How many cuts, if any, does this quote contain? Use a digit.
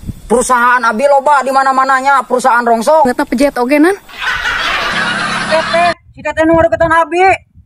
2